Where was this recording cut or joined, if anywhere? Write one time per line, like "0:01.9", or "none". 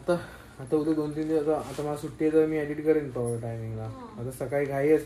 none